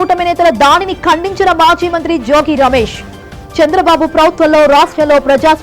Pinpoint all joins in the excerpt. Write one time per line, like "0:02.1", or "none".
none